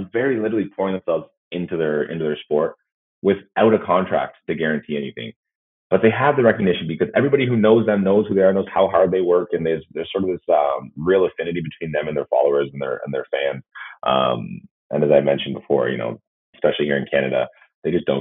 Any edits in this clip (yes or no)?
no